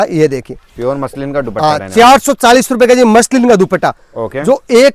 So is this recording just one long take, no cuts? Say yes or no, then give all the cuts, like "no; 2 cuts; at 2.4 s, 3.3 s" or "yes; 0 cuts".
yes; 0 cuts